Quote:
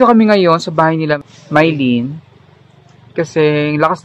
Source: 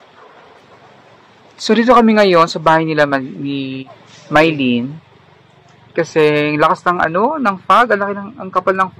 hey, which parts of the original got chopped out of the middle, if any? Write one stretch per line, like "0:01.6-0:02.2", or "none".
0:03.1-0:04.0